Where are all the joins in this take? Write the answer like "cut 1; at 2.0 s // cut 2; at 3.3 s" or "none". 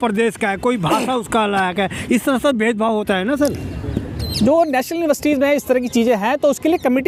none